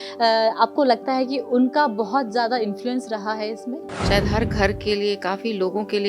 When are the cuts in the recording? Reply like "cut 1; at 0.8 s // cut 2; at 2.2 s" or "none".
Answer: cut 1; at 4.0 s

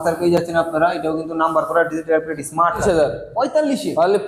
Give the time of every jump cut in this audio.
cut 1; at 2.8 s

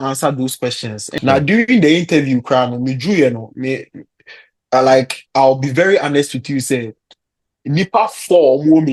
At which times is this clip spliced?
cut 1; at 1.2 s

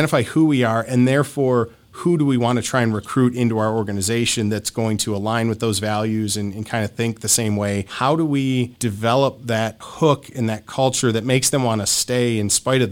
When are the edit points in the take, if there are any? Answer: cut 1; at 7.9 s // cut 2; at 8.7 s // cut 3; at 9.9 s

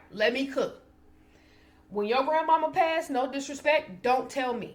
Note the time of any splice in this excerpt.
none

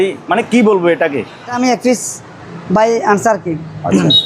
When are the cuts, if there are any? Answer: cut 1; at 1.6 s

